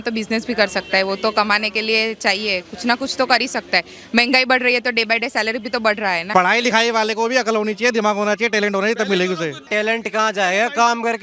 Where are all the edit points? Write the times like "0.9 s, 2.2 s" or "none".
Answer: 6.3 s, 9.7 s